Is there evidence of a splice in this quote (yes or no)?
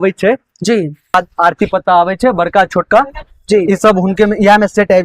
yes